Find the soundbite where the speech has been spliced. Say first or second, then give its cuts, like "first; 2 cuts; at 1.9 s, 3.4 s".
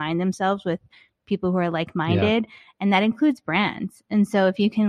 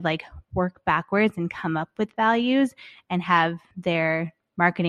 second; 1 cut; at 3.7 s